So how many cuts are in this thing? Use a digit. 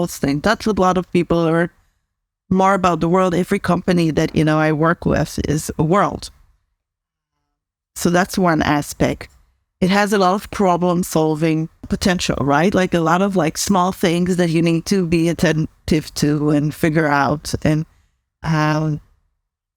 1